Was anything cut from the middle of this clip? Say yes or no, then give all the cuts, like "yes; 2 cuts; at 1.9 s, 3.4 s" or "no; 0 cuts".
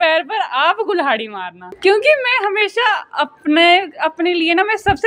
yes; 1 cut; at 1.6 s